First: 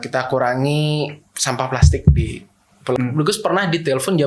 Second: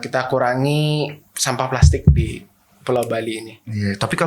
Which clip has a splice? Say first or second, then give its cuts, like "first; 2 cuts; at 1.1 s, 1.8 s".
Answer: first; 1 cut; at 3.0 s